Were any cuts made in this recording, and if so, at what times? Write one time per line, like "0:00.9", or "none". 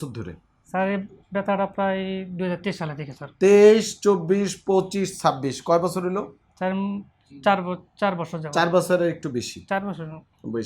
none